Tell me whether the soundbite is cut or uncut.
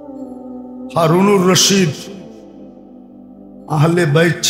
uncut